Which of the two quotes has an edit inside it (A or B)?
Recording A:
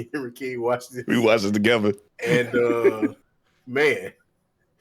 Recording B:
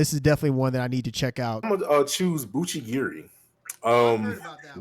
B